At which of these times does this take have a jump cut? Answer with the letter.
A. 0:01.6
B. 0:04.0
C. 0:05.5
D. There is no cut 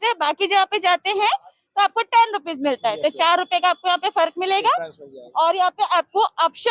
D